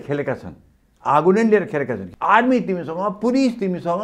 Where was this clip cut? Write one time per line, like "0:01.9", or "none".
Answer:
0:02.0